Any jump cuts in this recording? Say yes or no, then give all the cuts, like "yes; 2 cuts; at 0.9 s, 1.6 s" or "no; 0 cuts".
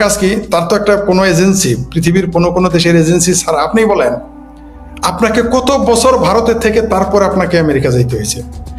no; 0 cuts